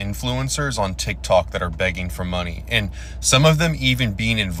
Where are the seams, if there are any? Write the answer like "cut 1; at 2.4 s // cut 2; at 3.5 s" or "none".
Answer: none